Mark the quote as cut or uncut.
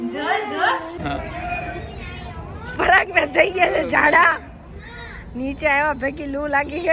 cut